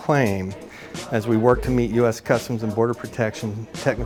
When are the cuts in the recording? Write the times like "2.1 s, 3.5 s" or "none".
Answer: none